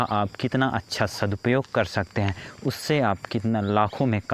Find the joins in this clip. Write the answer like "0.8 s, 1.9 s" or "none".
none

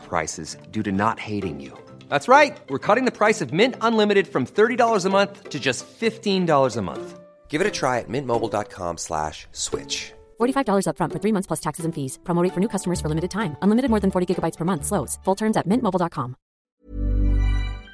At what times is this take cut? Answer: 16.7 s

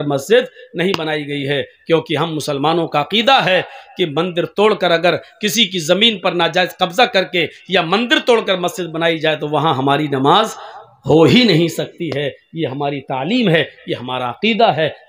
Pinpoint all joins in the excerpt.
none

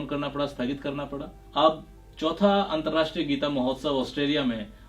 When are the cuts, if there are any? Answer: 1.4 s

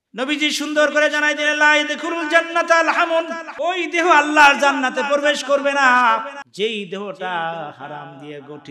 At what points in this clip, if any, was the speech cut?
3.4 s, 6.4 s

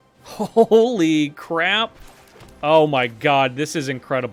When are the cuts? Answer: none

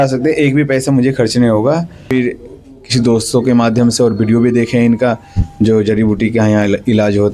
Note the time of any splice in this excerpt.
2.0 s

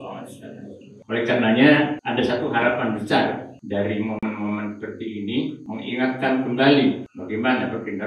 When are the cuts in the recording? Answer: 0.9 s, 2.0 s, 3.5 s, 5.6 s, 7.1 s

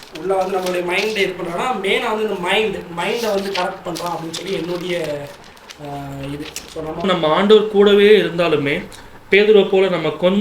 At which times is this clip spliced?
7.0 s

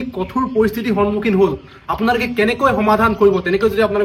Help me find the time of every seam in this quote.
none

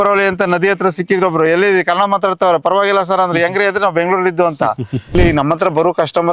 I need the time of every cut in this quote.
5.2 s

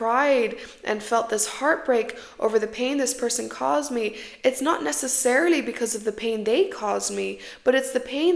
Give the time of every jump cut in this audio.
none

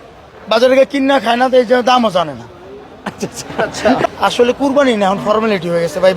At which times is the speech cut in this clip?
4.1 s

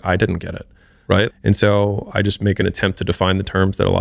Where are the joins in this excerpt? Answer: 1.3 s, 2.6 s

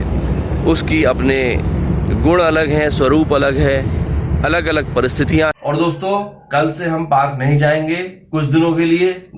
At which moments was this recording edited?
5.5 s

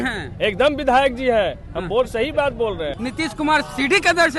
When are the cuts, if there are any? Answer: 2.9 s

